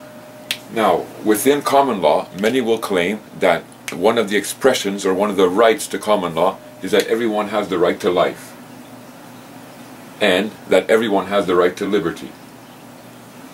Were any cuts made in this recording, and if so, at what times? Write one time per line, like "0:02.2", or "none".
0:03.6